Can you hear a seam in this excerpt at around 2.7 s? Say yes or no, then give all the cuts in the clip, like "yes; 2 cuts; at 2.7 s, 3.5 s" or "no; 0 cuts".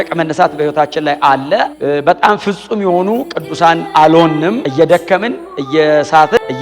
no; 1 cut; at 4.6 s